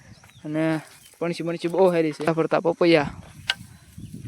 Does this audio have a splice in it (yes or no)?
yes